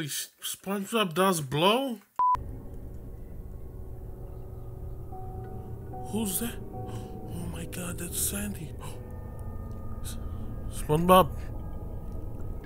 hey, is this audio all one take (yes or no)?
no